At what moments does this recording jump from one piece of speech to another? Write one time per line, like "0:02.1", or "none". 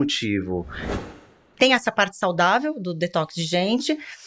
0:01.2